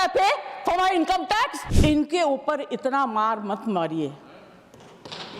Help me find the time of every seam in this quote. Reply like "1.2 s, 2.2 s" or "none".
1.6 s